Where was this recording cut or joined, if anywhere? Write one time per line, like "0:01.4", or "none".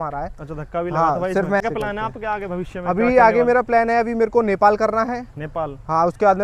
0:01.6